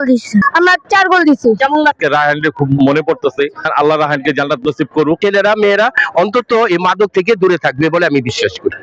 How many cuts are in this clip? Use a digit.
2